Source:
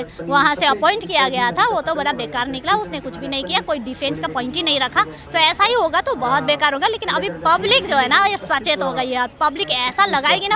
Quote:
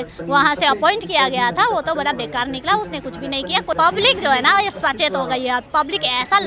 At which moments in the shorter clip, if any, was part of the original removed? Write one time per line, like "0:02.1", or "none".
0:03.8